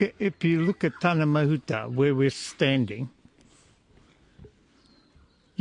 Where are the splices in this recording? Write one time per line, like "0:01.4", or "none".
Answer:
none

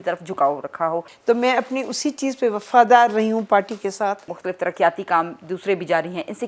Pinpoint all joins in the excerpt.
0:01.1
0:04.4

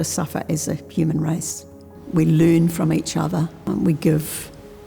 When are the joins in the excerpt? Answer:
0:03.6

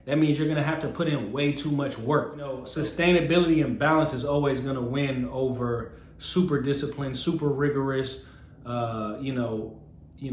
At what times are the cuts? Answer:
0:02.7

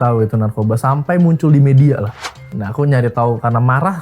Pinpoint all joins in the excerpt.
0:02.6

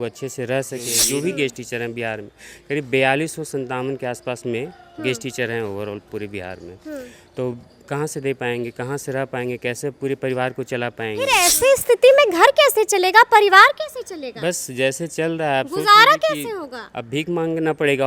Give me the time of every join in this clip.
0:01.0
0:11.3

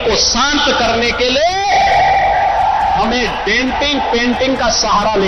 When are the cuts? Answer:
none

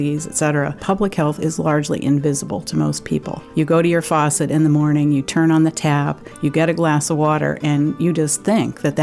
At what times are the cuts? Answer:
0:00.8
0:03.4

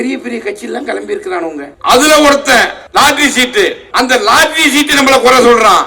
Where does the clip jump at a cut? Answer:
0:01.7
0:02.8
0:03.8

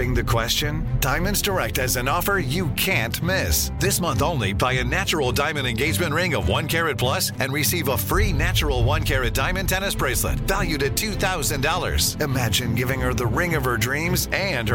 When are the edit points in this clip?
none

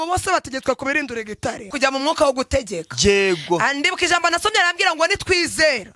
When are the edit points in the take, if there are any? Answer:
0:01.7

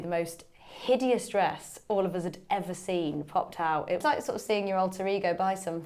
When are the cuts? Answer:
0:04.0

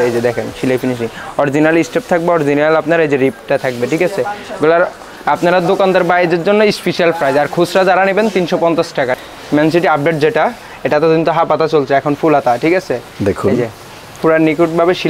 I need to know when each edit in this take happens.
0:09.2

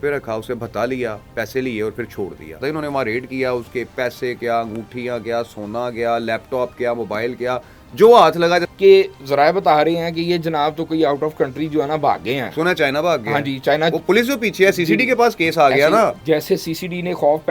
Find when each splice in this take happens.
0:02.6
0:08.7
0:16.2

